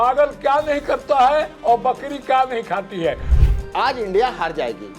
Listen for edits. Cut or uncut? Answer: cut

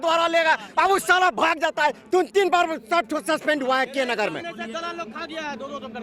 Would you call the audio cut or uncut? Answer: uncut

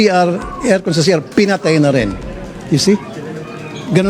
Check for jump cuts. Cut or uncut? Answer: cut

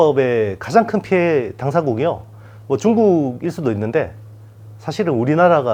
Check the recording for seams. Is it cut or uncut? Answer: uncut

